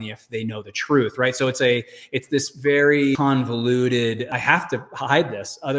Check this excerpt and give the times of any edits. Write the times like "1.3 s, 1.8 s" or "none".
3.2 s, 4.3 s